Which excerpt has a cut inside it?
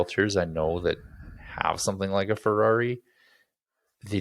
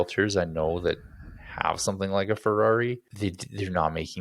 second; 1 cut; at 3.1 s

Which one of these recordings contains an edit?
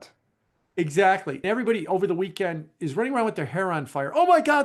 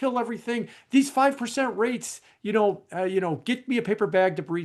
first; 1 cut; at 1.4 s

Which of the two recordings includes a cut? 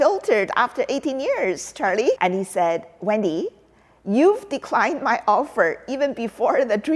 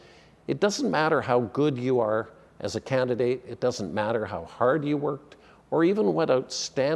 first; 1 cut; at 2.2 s

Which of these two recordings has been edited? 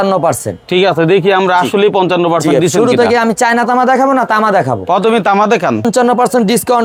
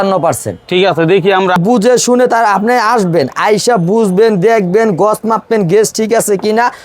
second; 1 cut; at 1.6 s

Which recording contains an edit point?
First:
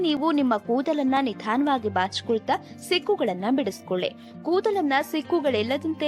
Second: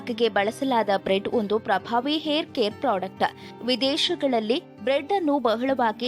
second; 1 cut; at 3.5 s

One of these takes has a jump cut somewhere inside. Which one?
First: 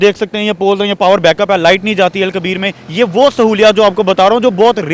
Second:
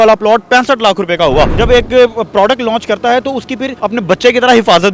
second; 1 cut; at 1.5 s

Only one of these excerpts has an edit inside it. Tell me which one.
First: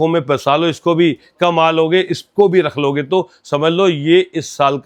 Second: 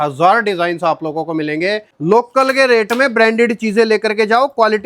second; 1 cut; at 1.9 s

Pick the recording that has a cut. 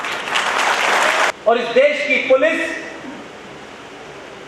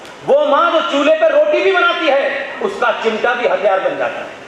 first; 1 cut; at 1.4 s

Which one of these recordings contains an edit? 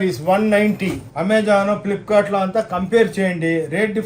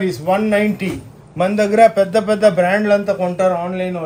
first; 1 cut; at 1.1 s

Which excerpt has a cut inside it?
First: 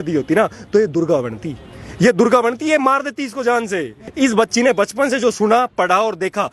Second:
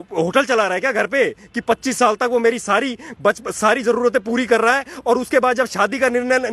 first; 1 cut; at 4.0 s

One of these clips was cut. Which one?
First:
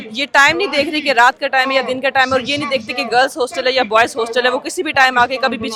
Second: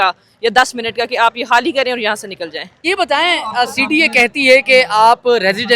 second; 1 cut; at 2.8 s

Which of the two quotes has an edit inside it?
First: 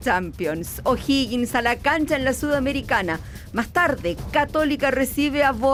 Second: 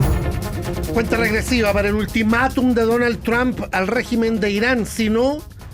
second; 1 cut; at 0.9 s

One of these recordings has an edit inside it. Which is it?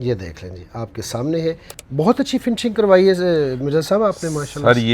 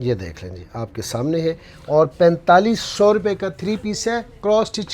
first; 1 cut; at 1.7 s

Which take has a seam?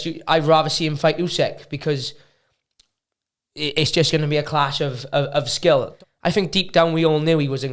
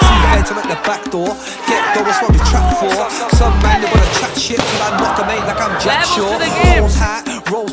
first; 1 cut; at 5.9 s

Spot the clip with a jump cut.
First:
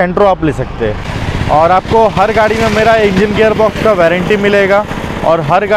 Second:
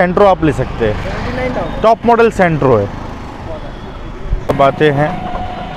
first; 1 cut; at 1.1 s

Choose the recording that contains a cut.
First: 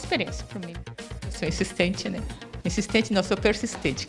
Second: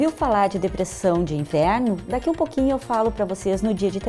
first; 2 cuts; at 1.2 s, 2.4 s

